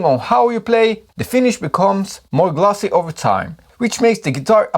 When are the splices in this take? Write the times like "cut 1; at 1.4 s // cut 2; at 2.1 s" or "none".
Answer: cut 1; at 1.0 s